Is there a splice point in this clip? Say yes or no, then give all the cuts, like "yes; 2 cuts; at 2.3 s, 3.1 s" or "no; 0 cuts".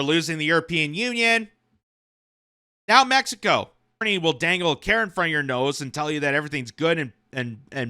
yes; 1 cut; at 4.0 s